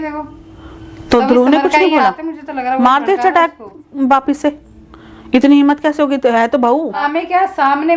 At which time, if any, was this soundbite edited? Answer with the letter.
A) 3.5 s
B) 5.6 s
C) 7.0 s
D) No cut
C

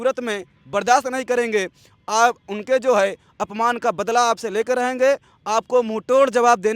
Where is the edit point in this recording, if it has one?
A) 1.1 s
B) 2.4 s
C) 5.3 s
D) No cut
D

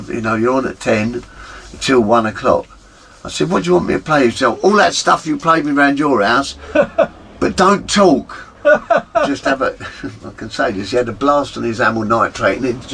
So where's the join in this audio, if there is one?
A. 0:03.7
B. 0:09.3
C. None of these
B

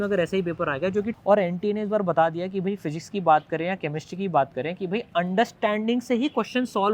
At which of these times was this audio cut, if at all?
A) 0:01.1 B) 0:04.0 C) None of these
A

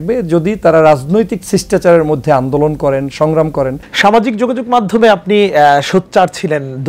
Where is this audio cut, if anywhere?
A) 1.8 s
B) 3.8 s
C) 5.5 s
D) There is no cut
B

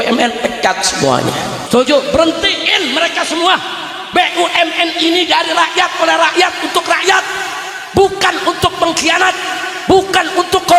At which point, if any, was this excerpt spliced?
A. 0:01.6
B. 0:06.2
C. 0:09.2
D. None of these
A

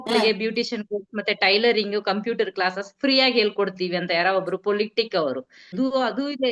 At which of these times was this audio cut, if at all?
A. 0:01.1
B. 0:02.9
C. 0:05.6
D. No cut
C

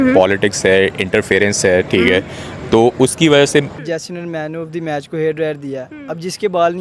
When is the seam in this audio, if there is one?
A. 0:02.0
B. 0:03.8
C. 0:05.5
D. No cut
B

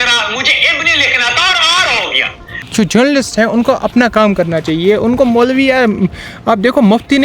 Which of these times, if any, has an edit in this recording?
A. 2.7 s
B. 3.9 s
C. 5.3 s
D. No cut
A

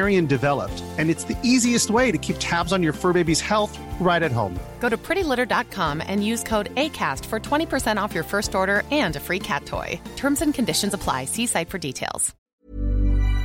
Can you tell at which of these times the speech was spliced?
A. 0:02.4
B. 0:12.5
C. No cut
B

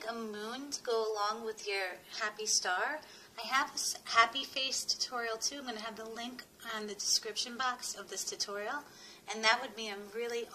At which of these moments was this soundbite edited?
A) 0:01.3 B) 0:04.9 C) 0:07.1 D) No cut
A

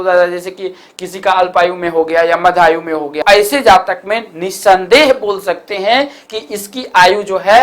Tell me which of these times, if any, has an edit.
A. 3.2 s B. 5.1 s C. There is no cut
A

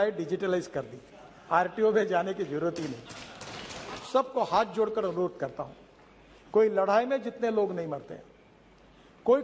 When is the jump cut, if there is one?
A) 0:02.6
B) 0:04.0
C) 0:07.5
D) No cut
B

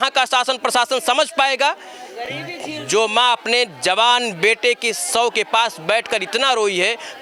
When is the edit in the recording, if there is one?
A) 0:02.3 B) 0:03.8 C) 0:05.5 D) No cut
D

